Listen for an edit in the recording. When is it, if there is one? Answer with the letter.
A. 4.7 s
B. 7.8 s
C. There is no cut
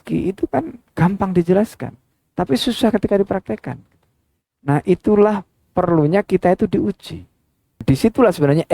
B